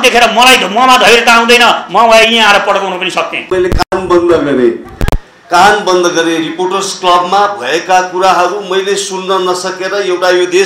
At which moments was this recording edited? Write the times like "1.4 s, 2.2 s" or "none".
3.4 s